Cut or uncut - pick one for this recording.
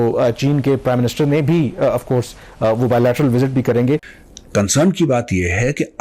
uncut